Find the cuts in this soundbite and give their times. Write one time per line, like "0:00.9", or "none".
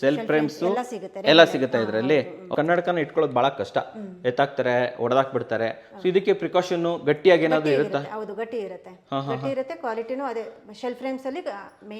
0:02.5